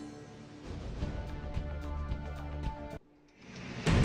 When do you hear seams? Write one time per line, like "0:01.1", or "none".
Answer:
0:03.1